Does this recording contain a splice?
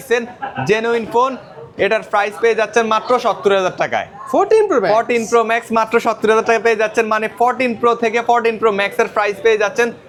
no; 0 cuts

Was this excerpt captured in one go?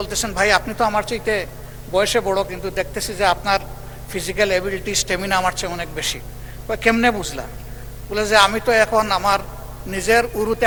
yes; 0 cuts

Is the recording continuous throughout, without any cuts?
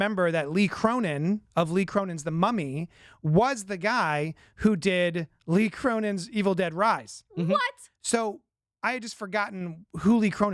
yes; 0 cuts

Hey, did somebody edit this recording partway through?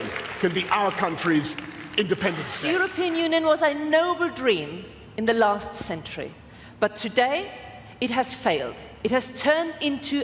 yes; 1 cut; at 2.6 s

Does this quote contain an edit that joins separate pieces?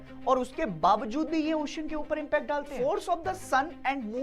yes; 1 cut; at 2.7 s

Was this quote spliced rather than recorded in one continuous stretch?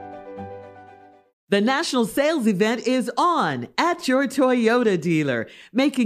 no; 0 cuts

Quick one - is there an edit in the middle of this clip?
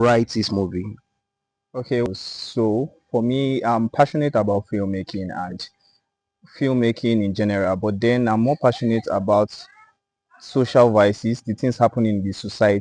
yes; 1 cut; at 2.1 s

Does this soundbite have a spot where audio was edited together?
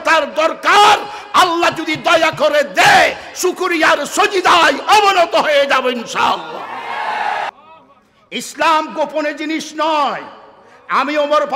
yes; 1 cut; at 7.5 s

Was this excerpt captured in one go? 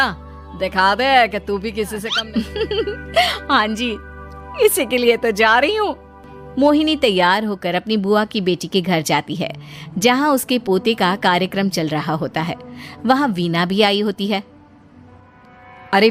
no; 1 cut; at 2.1 s

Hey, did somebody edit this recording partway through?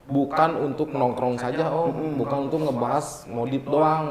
no; 0 cuts

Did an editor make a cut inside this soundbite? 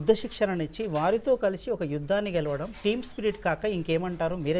no; 0 cuts

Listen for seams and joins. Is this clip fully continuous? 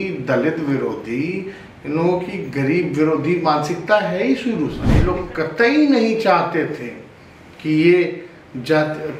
no; 1 cut; at 5.0 s

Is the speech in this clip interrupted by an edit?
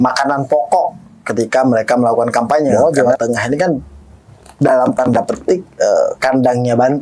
yes; 1 cut; at 2.9 s

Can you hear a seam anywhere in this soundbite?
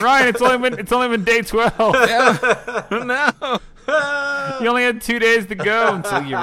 no; 0 cuts

